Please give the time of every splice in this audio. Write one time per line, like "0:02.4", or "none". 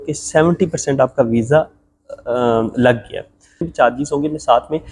0:03.7

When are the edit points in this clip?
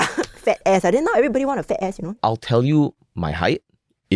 0:02.2

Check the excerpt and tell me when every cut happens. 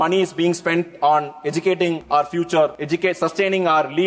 0:02.0
0:02.8

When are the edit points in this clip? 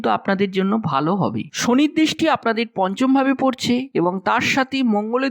0:01.4

